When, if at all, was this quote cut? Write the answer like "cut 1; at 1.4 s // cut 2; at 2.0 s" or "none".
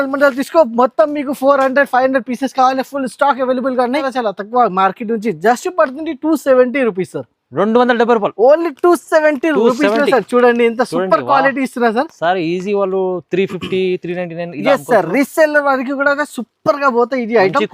cut 1; at 4.1 s